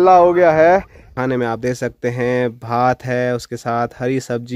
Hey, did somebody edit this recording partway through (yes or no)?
yes